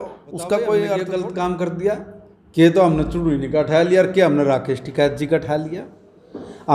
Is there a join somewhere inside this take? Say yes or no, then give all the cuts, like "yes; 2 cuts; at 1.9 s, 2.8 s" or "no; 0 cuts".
yes; 1 cut; at 1.0 s